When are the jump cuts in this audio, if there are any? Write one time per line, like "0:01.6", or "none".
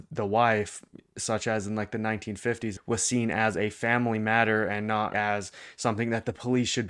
0:02.8
0:05.1